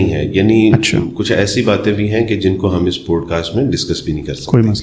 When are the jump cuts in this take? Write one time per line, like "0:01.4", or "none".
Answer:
none